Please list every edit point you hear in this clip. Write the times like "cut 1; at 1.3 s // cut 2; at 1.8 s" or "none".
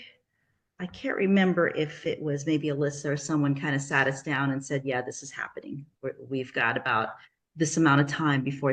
none